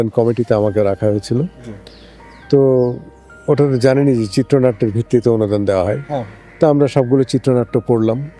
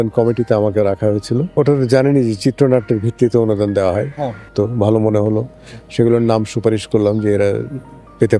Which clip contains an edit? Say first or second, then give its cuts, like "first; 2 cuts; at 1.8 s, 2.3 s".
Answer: second; 2 cuts; at 1.5 s, 4.5 s